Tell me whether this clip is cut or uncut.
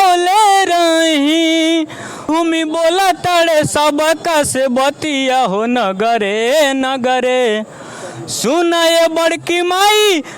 cut